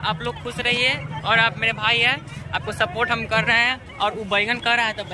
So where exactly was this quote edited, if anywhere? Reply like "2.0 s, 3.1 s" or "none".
none